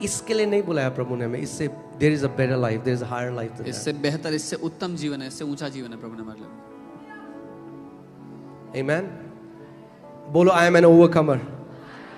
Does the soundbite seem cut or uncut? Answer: uncut